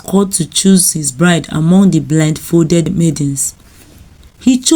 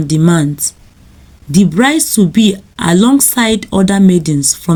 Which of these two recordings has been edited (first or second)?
first